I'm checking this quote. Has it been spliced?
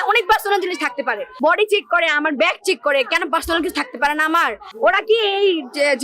yes; 2 cuts; at 1.2 s, 4.6 s

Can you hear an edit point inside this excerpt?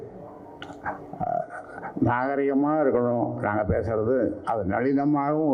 no; 0 cuts

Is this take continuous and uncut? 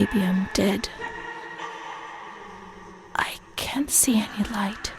no; 2 cuts; at 1.0 s, 3.0 s

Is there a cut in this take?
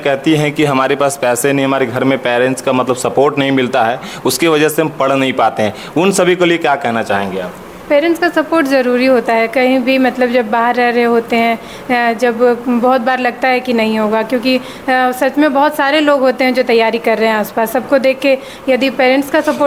no; 0 cuts

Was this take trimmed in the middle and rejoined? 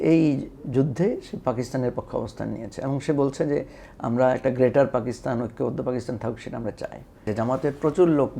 yes; 1 cut; at 7.3 s

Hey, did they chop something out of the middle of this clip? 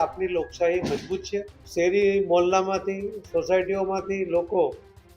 yes; 1 cut; at 1.6 s

